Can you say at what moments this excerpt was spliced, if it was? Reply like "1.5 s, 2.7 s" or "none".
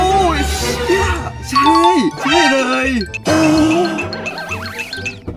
3.1 s